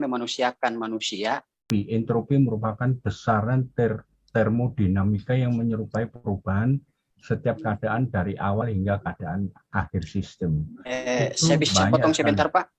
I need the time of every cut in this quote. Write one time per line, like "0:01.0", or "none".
0:01.6

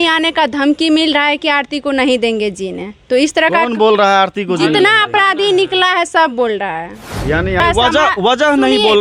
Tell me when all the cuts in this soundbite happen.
0:07.6

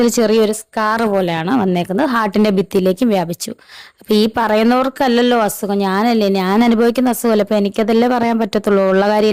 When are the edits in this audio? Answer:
none

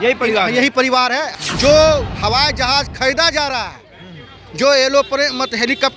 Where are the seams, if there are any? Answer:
0:01.3

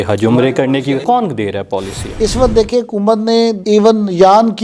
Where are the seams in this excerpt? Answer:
0:01.0
0:02.2

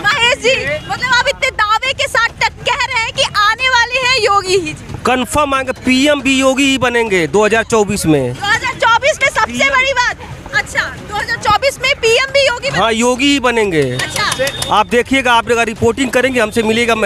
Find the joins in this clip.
none

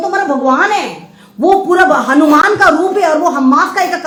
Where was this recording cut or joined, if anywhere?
none

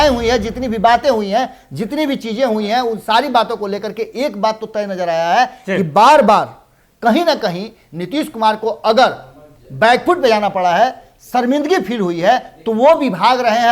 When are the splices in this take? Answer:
none

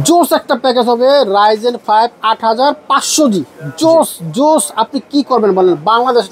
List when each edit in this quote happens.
none

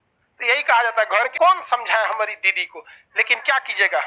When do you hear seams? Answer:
0:01.3

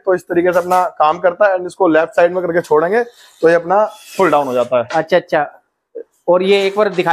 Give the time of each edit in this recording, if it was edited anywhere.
none

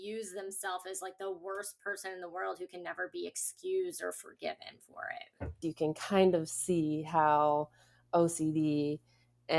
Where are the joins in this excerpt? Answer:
0:05.6

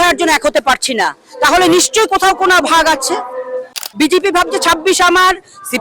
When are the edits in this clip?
0:03.7

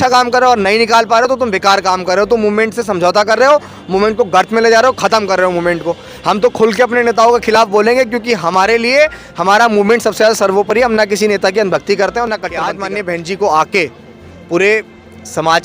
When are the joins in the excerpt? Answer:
0:12.8

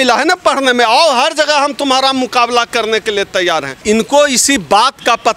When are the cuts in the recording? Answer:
0:03.8

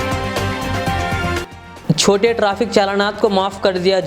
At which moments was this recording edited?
0:01.3

